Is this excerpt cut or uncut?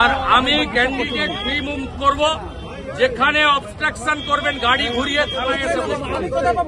uncut